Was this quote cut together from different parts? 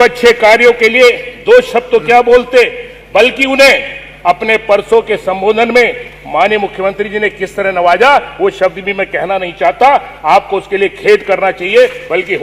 no; 0 cuts

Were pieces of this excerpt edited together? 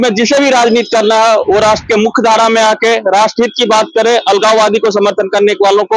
no; 0 cuts

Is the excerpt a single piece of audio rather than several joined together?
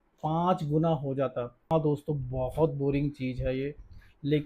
no; 1 cut; at 1.6 s

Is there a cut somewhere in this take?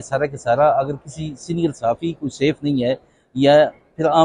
no; 0 cuts

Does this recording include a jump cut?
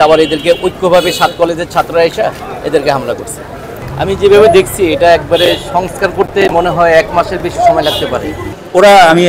yes; 2 cuts; at 3.7 s, 8.5 s

